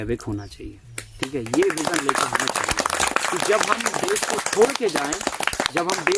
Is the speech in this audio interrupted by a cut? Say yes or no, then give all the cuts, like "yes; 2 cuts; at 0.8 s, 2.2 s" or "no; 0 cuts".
no; 0 cuts